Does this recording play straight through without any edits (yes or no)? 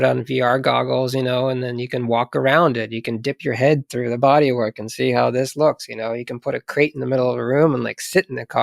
yes